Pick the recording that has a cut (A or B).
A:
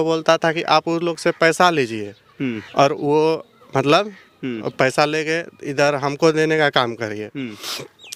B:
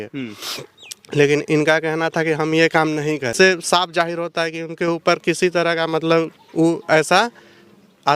B